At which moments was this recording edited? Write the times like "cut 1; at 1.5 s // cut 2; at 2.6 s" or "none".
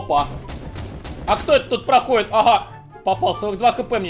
none